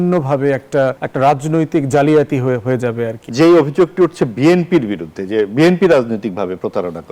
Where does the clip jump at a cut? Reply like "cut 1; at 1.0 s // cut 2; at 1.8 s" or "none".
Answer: cut 1; at 1.0 s // cut 2; at 3.2 s